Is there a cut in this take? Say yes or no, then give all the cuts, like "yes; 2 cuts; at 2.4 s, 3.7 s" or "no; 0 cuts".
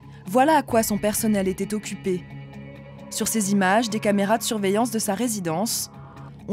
no; 0 cuts